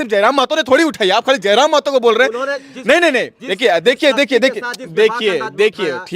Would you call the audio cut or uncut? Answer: uncut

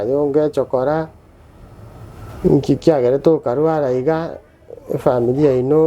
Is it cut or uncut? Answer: uncut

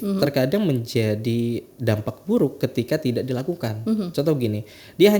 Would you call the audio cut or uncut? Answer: uncut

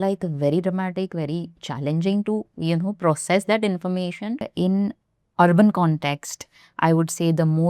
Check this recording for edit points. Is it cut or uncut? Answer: cut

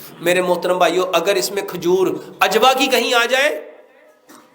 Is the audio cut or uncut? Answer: uncut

